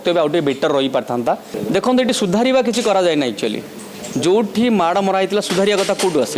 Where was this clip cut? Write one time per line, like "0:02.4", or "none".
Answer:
0:01.5

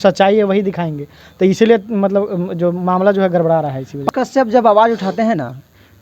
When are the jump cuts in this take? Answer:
0:04.1

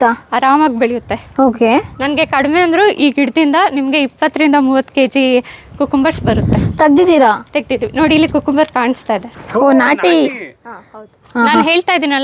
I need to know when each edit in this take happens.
none

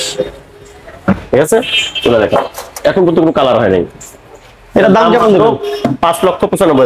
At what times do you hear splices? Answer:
none

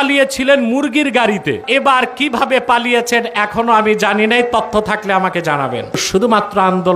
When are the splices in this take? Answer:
0:01.6
0:06.0

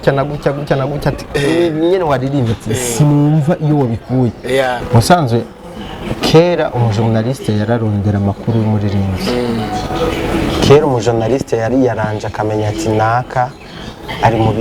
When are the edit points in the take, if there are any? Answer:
0:04.8

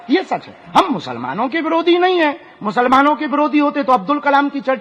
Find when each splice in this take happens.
none

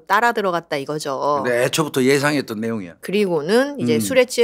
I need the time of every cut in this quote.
0:02.9

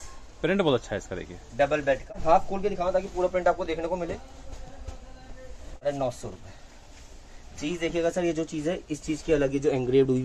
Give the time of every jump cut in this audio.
0:02.1
0:05.8

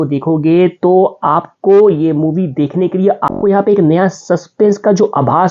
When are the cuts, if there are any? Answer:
0:03.3

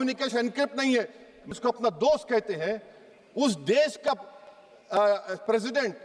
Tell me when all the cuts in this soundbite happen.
0:01.5

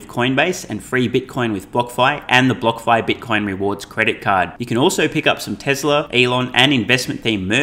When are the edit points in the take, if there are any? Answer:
0:06.1

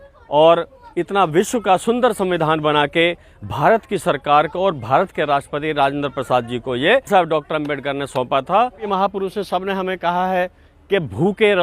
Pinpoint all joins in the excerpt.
0:08.9

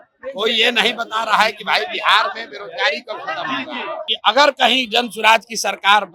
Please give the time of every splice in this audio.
0:04.1

